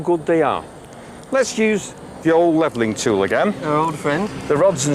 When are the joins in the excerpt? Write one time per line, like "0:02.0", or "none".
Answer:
0:02.2